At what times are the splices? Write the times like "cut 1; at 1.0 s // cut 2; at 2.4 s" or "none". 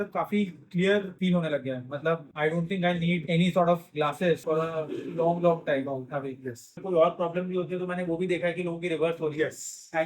cut 1; at 1.1 s // cut 2; at 2.3 s // cut 3; at 3.2 s // cut 4; at 4.4 s // cut 5; at 6.8 s